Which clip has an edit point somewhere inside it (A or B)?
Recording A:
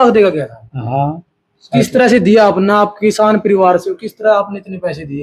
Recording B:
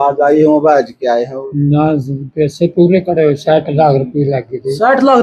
B